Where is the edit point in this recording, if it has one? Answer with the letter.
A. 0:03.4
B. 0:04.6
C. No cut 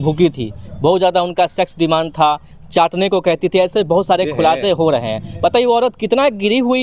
C